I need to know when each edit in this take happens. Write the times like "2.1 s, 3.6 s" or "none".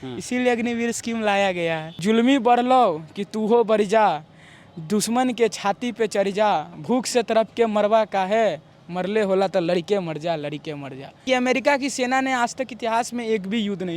1.9 s, 11.1 s

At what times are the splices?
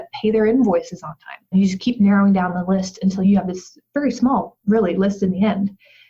1.5 s, 3.3 s

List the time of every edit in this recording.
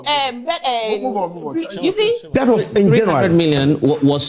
2.2 s

